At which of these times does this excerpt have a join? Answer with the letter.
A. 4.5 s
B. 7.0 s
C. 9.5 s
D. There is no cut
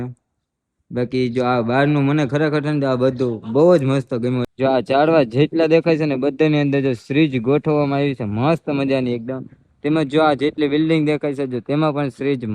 A